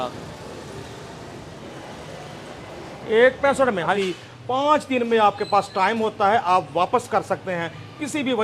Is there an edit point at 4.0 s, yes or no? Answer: yes